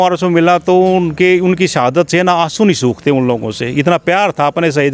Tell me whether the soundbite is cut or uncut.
uncut